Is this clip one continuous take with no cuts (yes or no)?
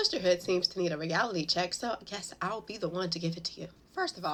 yes